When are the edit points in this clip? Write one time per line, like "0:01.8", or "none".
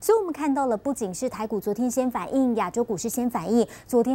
none